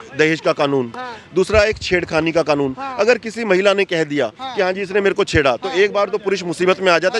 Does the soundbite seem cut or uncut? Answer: uncut